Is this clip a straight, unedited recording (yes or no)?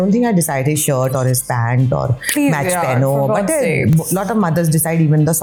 yes